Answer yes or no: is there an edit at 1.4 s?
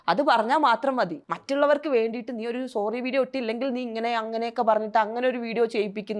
yes